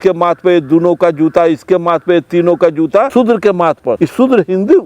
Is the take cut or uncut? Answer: cut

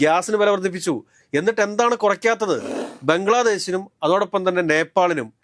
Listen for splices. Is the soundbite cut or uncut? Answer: cut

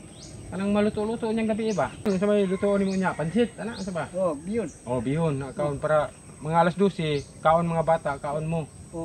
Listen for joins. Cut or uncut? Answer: cut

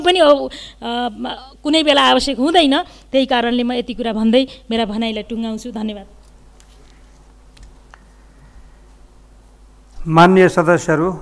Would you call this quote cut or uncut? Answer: uncut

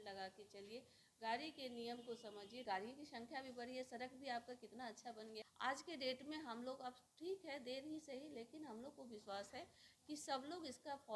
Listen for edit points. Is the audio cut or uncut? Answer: cut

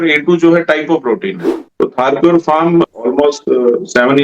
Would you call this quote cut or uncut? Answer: cut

